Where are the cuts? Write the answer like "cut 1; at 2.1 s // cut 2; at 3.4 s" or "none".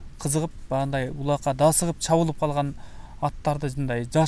none